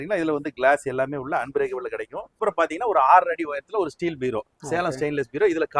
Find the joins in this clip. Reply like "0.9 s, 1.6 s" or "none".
2.4 s